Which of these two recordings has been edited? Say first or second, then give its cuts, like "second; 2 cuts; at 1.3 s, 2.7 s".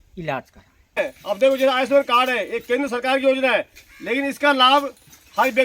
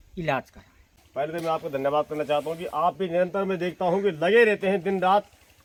first; 1 cut; at 1.0 s